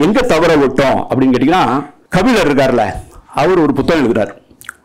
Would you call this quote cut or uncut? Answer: cut